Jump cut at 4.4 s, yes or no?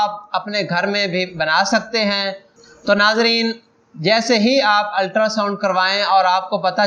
no